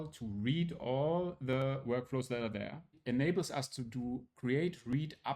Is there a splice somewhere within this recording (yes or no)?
yes